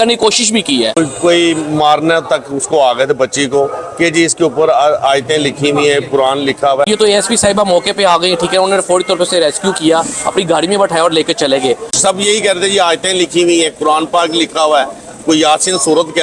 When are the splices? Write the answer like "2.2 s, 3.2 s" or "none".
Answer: 0.9 s, 6.9 s, 11.9 s